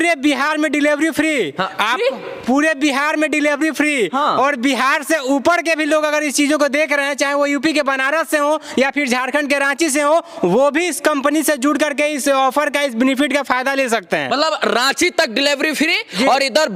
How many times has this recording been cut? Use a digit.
0